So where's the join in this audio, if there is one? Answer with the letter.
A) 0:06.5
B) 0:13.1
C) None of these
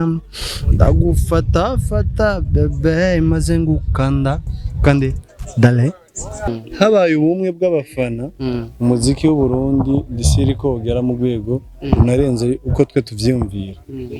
A